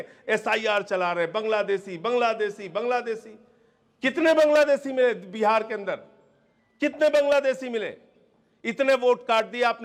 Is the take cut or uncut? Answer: uncut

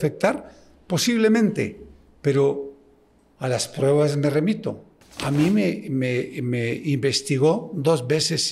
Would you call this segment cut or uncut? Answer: uncut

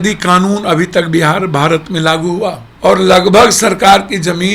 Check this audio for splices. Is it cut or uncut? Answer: cut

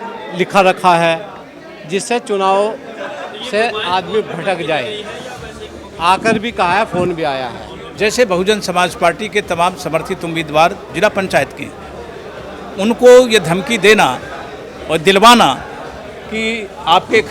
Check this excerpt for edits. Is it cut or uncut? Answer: cut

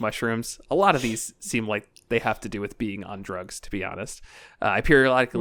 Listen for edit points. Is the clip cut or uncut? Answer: uncut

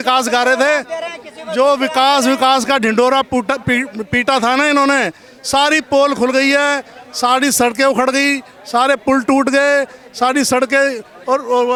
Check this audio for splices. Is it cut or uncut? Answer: uncut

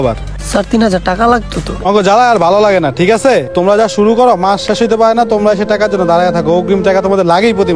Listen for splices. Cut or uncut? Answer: cut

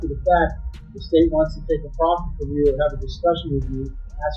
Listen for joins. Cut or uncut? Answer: uncut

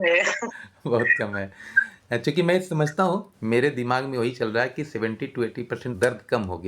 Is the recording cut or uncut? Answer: cut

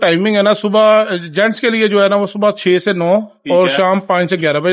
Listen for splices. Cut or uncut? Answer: uncut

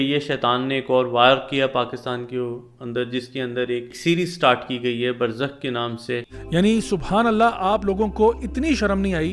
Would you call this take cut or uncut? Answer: cut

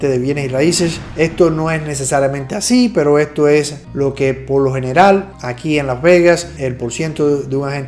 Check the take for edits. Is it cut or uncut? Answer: cut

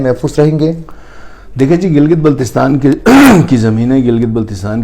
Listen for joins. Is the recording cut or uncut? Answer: uncut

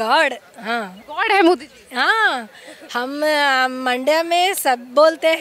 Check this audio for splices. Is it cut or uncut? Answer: uncut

